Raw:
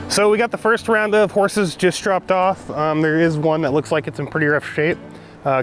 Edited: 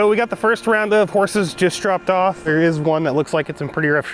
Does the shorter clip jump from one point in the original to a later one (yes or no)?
yes